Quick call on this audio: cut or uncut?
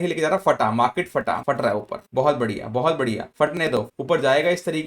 cut